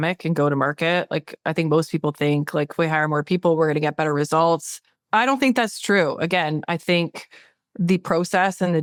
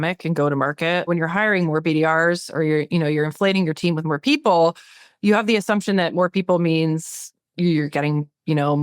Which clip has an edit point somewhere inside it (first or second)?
second